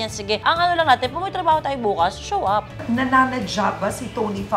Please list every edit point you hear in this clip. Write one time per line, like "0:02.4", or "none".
0:02.8